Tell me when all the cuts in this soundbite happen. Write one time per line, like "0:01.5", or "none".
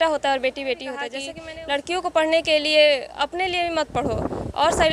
0:01.3